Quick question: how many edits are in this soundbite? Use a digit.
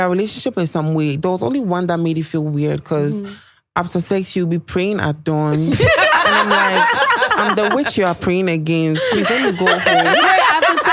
0